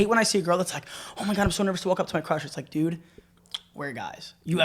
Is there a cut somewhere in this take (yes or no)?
no